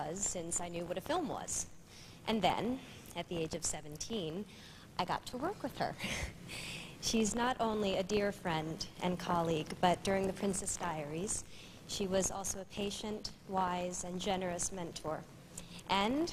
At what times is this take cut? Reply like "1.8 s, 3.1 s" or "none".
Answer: none